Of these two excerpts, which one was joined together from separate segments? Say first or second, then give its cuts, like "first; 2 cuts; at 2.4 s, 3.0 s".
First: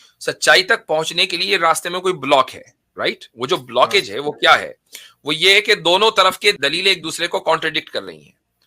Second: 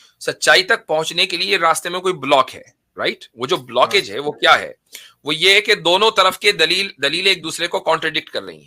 first; 1 cut; at 6.6 s